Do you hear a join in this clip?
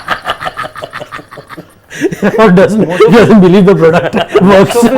no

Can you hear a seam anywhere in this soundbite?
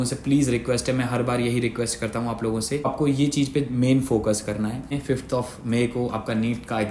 yes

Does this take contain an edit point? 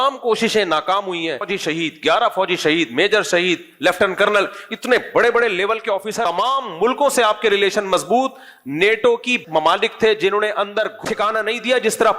yes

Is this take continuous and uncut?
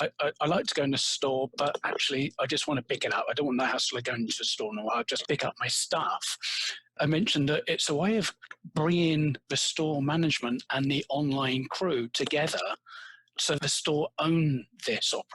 no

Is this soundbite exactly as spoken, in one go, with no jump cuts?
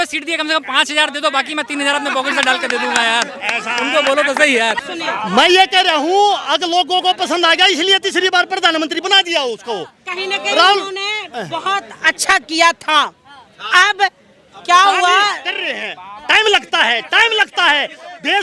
no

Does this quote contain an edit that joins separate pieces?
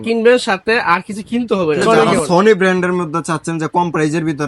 yes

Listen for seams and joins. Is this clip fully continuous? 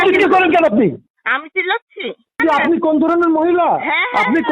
no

